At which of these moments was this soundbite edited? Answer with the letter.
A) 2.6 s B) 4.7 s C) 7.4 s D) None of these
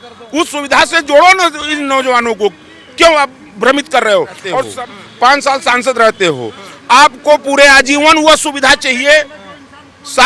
B